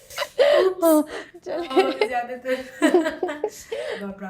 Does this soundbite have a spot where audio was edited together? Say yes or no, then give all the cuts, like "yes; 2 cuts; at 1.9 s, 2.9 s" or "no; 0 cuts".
no; 0 cuts